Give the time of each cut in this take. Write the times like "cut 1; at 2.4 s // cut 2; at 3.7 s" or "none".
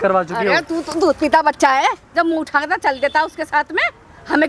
none

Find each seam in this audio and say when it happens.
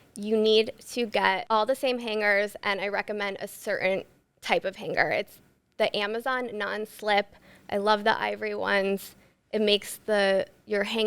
cut 1; at 1.4 s

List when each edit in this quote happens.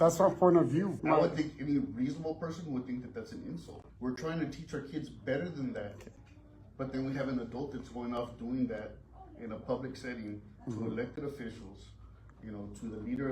cut 1; at 1.0 s // cut 2; at 3.8 s

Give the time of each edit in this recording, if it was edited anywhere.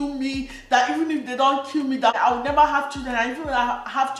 cut 1; at 2.1 s

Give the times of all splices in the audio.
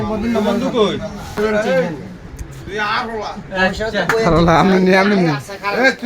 cut 1; at 1.4 s

